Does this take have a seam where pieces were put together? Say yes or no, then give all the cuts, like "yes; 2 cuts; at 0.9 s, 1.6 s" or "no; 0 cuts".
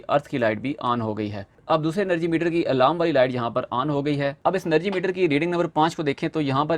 yes; 1 cut; at 1.5 s